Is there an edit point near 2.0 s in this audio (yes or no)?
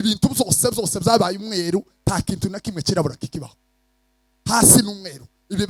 no